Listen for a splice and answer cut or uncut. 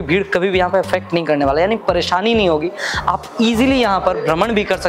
uncut